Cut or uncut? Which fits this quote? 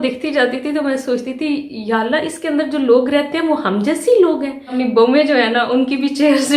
cut